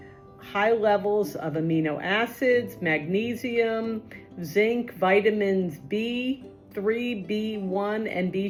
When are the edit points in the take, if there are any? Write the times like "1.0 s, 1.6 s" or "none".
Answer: none

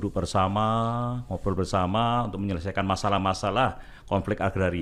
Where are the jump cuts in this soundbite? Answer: none

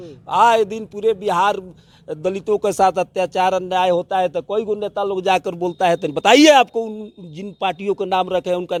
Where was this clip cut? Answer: none

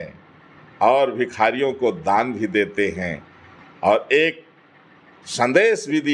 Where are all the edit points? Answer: none

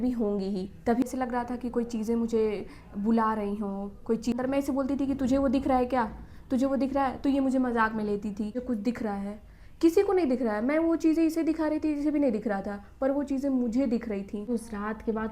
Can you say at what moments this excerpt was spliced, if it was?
1.0 s, 4.3 s, 8.6 s, 14.5 s

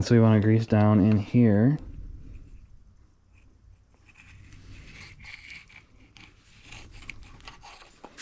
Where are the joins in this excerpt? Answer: none

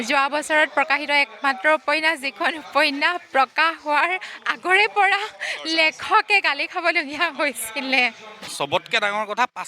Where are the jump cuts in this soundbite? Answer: 8.5 s

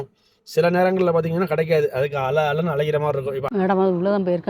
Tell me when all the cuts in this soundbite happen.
3.5 s

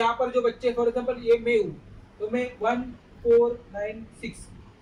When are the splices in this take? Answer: none

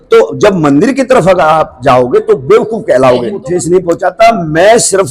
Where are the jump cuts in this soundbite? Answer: 3.4 s

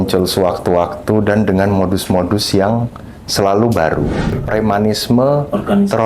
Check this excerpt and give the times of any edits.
4.3 s

